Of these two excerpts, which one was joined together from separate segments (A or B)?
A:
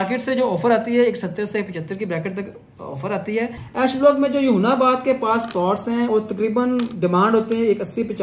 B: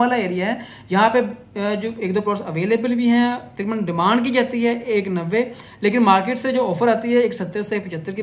A